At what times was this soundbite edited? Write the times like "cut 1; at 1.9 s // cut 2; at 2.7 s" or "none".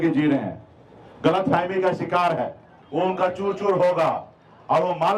cut 1; at 2.8 s

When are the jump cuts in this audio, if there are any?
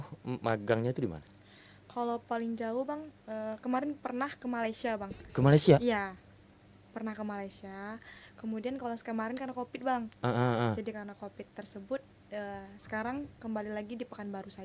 none

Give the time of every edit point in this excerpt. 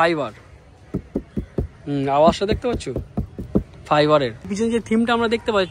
cut 1; at 4.4 s

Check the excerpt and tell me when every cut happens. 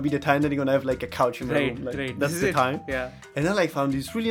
cut 1; at 3.3 s

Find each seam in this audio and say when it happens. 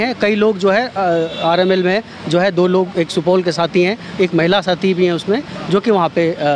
none

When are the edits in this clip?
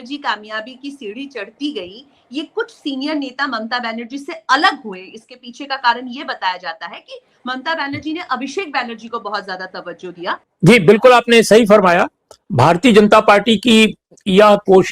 cut 1; at 10.5 s

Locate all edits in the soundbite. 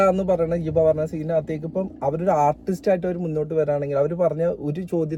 none

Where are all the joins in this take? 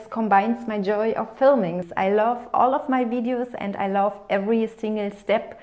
cut 1; at 1.9 s

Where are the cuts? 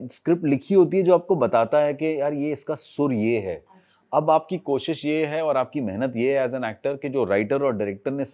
none

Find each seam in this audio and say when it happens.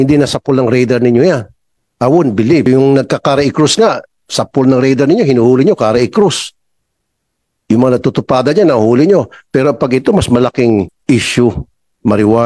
cut 1; at 2.7 s // cut 2; at 11.0 s

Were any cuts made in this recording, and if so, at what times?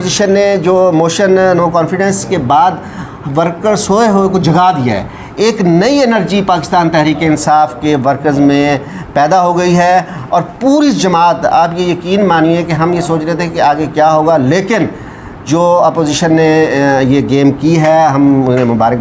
none

